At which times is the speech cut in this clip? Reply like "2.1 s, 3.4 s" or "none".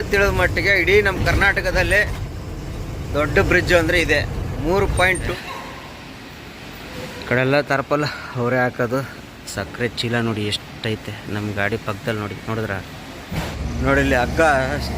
5.3 s, 13.6 s